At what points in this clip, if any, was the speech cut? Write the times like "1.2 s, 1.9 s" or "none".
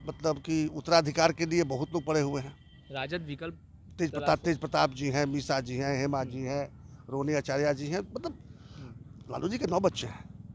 none

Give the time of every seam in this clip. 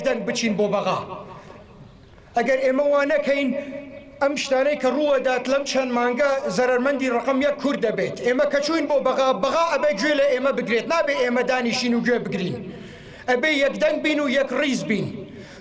9.3 s

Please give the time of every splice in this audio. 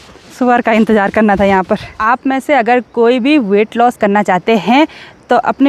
1.9 s

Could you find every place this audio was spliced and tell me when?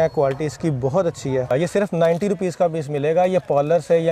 1.5 s

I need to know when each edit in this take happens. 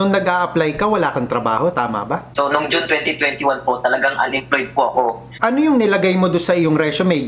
2.4 s, 5.3 s

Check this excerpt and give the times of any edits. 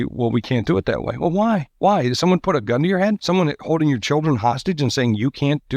1.7 s, 3.2 s

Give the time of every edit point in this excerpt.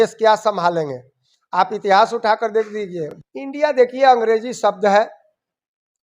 3.0 s

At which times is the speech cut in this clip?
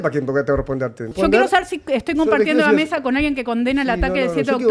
1.1 s

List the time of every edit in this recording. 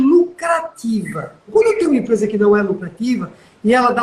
1.5 s

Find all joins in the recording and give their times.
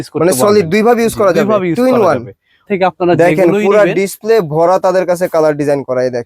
2.7 s

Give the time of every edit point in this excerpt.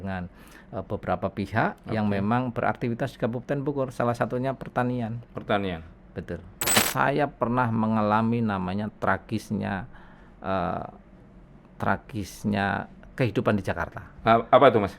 6.9 s

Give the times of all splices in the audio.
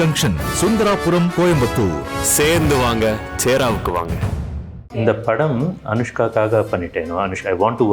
4.9 s

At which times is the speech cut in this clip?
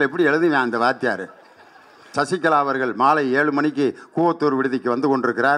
2.0 s

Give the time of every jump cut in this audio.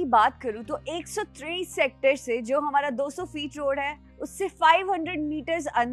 none

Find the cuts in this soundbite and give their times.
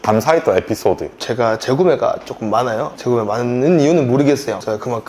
1.2 s

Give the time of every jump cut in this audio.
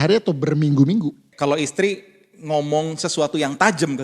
1.2 s

